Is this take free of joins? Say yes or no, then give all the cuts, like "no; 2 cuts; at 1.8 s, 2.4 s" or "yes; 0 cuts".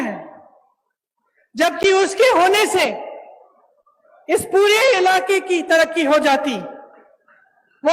yes; 0 cuts